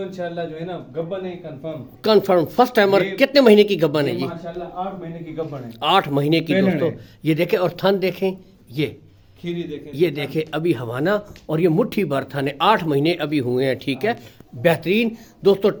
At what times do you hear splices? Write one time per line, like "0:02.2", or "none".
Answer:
none